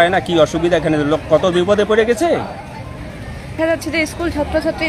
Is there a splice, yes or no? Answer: yes